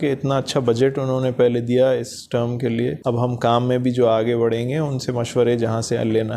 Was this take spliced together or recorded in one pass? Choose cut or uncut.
cut